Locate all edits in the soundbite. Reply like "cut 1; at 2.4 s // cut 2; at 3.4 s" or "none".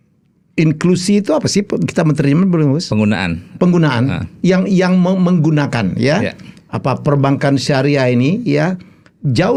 none